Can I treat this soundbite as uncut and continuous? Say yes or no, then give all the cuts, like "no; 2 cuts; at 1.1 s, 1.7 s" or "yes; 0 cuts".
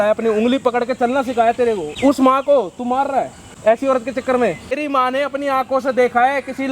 no; 3 cuts; at 1.9 s, 3.4 s, 4.8 s